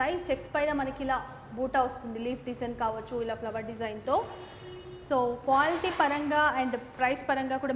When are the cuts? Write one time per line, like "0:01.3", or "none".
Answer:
none